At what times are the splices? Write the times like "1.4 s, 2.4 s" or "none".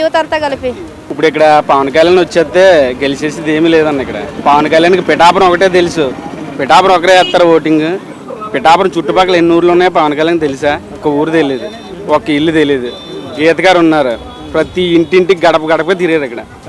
1.0 s, 4.3 s, 11.0 s